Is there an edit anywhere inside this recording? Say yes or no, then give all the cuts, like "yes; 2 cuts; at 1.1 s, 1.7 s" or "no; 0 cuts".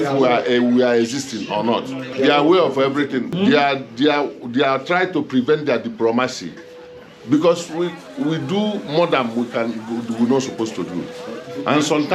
yes; 2 cuts; at 2.0 s, 3.3 s